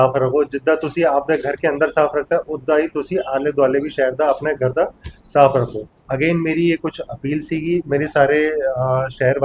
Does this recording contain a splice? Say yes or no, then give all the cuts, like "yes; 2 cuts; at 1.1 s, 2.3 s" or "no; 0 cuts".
yes; 1 cut; at 6.1 s